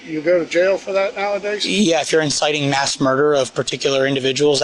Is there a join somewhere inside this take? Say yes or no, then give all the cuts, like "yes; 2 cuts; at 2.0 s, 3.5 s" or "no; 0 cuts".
no; 0 cuts